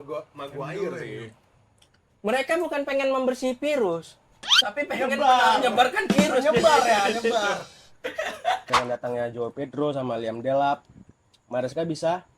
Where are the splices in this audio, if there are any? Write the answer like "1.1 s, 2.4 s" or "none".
8.7 s